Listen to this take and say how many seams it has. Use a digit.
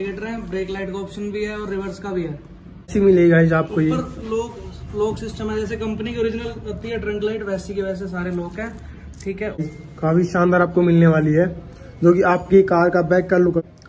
2